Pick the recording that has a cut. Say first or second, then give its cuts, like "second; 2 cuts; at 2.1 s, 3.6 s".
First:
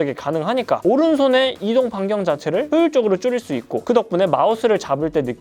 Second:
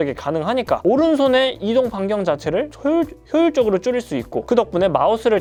first; 1 cut; at 2.7 s